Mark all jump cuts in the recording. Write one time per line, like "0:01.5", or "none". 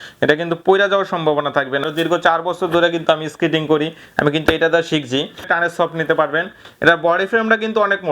0:01.8
0:05.5